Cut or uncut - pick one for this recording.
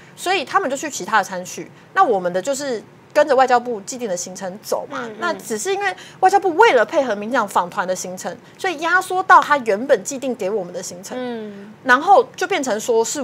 uncut